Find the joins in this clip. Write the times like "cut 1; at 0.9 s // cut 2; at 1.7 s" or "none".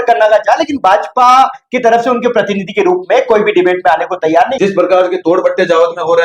cut 1; at 4.5 s